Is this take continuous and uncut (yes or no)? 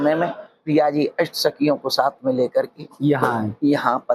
yes